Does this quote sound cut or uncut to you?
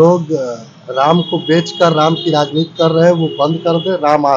uncut